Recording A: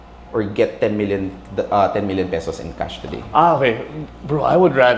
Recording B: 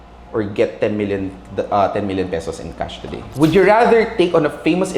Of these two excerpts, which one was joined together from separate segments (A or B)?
B